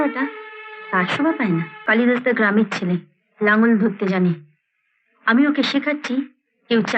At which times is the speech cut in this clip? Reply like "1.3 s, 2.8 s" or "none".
1.7 s